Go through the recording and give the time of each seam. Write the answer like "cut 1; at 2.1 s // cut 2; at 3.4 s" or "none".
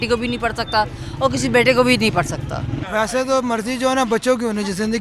cut 1; at 2.8 s